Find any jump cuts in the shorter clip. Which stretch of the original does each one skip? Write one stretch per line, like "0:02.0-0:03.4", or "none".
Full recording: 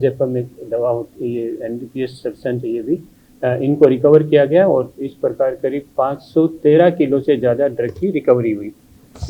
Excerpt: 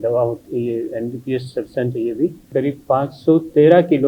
0:03.2-0:05.6